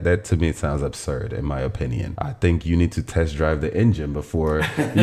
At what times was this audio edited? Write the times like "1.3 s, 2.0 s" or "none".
2.1 s